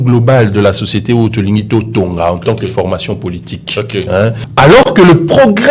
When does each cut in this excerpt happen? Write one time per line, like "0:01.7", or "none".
0:04.4